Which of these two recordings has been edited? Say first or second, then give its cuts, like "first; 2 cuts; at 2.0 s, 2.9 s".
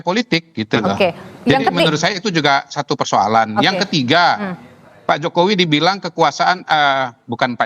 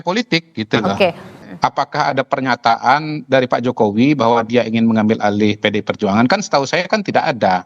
second; 1 cut; at 1.3 s